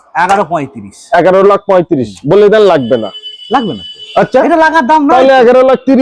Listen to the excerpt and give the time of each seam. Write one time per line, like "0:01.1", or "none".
none